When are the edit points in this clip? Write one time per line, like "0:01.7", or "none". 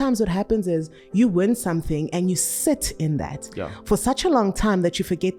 none